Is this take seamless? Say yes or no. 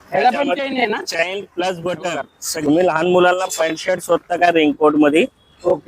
no